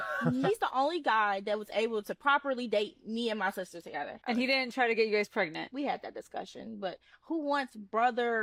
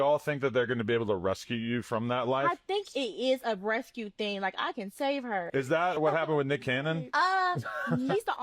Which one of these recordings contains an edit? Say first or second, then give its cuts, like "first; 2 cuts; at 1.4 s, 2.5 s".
second; 2 cuts; at 2.5 s, 6.6 s